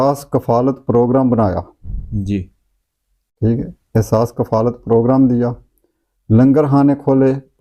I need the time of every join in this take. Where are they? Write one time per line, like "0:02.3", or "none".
none